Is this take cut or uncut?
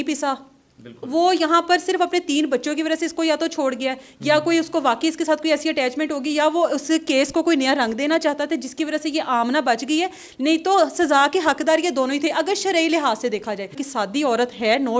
cut